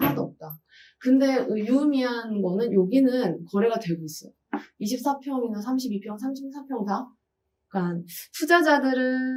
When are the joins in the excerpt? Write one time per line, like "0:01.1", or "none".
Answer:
none